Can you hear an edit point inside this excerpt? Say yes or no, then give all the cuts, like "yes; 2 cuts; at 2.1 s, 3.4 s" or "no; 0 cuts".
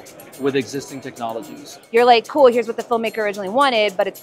yes; 1 cut; at 1.7 s